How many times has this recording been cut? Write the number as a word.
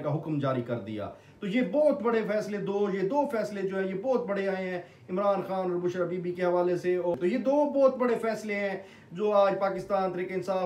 one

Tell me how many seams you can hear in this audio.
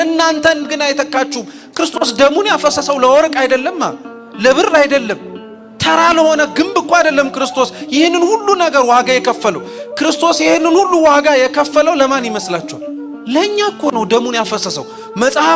zero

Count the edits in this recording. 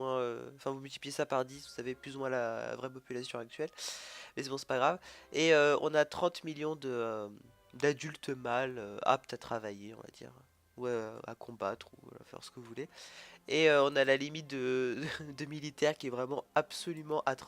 one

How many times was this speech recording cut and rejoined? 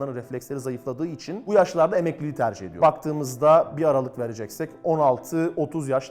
one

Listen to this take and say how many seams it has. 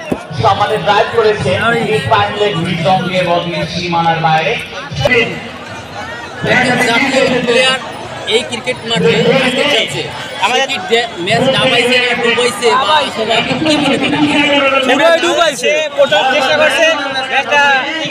one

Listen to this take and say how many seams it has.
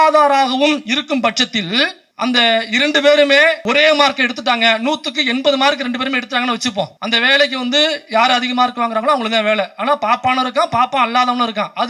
three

